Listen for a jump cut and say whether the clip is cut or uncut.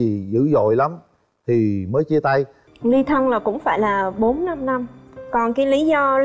cut